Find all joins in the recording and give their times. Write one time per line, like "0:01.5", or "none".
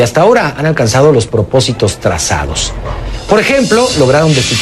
0:01.6